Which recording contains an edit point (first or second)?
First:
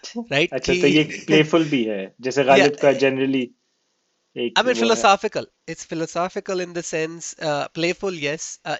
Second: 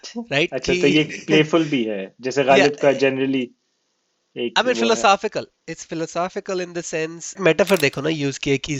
second